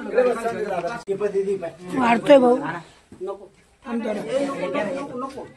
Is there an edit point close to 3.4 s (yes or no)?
no